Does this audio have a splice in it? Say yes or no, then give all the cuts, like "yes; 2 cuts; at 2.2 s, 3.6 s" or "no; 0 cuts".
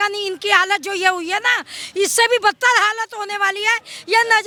no; 0 cuts